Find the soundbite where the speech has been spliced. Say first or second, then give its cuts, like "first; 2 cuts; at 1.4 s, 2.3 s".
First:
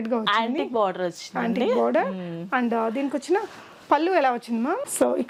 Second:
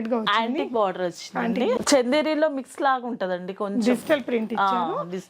second; 1 cut; at 1.8 s